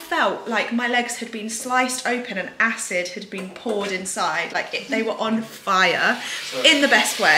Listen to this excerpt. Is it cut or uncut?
uncut